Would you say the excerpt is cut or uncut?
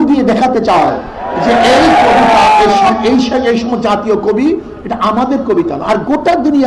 uncut